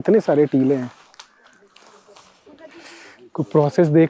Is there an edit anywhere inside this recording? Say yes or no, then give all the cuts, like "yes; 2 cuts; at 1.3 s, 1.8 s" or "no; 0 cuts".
no; 0 cuts